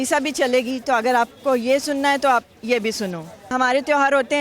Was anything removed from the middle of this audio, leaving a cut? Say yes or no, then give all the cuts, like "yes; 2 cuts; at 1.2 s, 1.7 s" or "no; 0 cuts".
yes; 1 cut; at 3.5 s